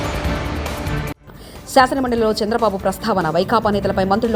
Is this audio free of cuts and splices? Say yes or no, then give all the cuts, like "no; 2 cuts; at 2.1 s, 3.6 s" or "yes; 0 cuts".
yes; 0 cuts